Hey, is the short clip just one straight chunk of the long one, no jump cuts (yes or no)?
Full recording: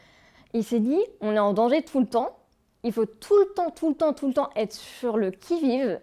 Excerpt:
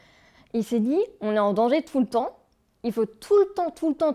yes